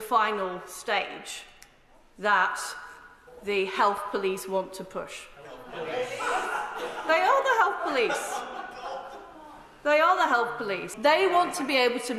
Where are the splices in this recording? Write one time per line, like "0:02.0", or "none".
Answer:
0:10.9